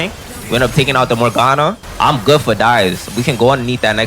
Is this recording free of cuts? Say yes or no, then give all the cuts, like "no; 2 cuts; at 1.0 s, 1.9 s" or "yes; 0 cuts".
no; 1 cut; at 1.8 s